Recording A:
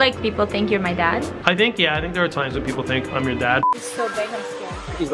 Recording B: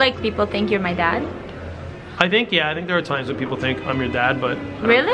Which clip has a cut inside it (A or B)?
A